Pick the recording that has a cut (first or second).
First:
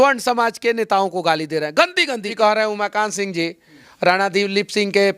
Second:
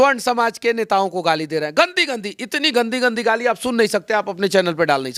first